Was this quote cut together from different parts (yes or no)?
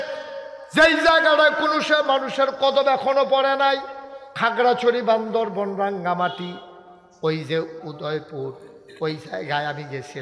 yes